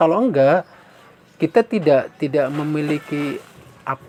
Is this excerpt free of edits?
yes; 0 cuts

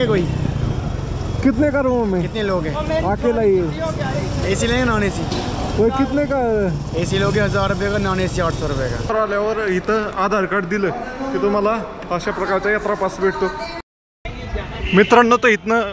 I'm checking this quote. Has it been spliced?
yes; 2 cuts; at 9.1 s, 13.7 s

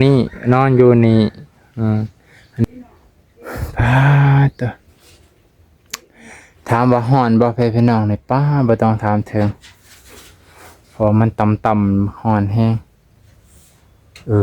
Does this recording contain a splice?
yes; 1 cut; at 2.6 s

